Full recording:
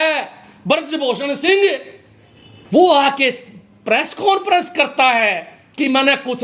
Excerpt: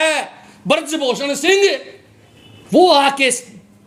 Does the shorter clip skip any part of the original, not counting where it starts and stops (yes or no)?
no